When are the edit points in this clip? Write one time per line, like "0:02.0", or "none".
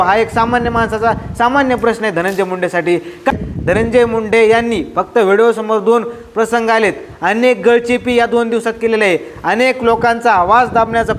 0:03.3